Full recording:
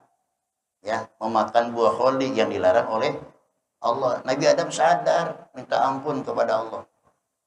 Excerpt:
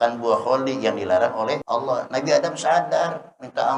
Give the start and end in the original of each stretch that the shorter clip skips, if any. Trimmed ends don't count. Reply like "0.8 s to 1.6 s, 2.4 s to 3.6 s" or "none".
3.2 s to 3.8 s